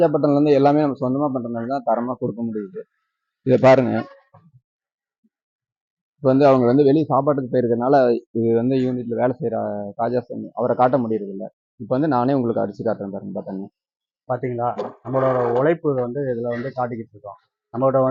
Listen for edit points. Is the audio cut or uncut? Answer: uncut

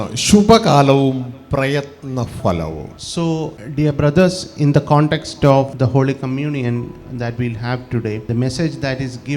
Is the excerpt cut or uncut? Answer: cut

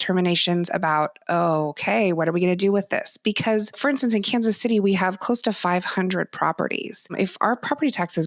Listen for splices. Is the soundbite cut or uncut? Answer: cut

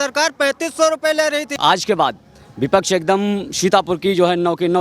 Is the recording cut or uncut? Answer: cut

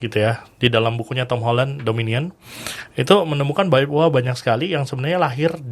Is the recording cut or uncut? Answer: uncut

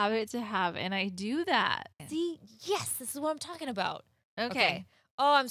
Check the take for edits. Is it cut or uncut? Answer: cut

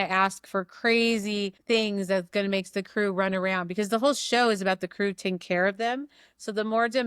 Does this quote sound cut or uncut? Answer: cut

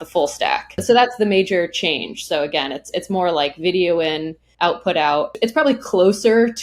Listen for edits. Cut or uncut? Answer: cut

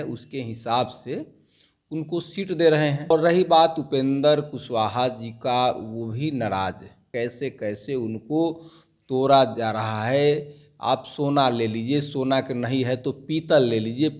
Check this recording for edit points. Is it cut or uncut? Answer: cut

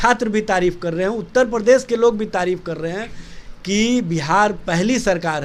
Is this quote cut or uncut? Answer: uncut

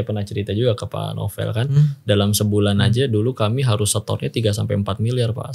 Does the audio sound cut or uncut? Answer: uncut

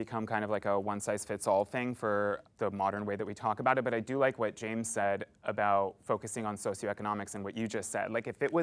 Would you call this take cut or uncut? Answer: cut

